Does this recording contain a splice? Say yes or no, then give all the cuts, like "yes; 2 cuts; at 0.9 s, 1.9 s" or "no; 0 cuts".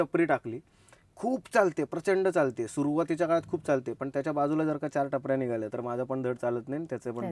no; 0 cuts